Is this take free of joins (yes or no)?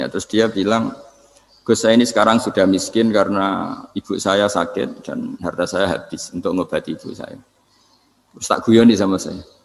yes